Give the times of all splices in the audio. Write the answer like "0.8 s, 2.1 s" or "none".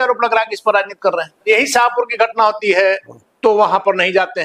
1.5 s